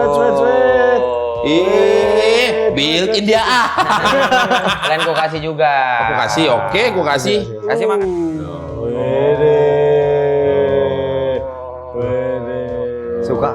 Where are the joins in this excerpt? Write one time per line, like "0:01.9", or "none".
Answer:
0:07.6